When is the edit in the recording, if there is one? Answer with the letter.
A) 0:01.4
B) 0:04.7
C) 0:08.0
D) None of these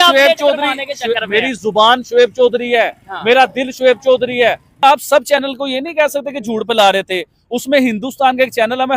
B